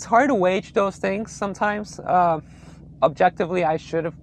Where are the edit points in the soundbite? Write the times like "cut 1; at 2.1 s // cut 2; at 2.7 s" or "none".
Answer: none